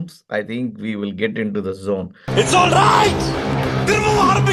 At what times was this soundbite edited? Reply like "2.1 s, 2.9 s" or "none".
none